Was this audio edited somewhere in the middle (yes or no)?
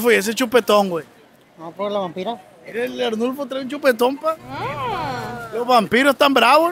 no